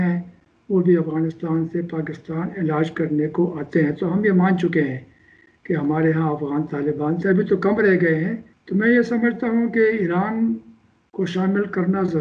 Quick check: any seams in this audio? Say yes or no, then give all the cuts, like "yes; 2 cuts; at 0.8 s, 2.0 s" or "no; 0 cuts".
no; 0 cuts